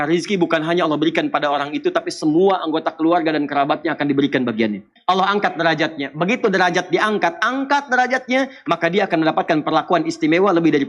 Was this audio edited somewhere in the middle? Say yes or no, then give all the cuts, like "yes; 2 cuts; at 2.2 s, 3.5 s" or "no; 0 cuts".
yes; 1 cut; at 4.9 s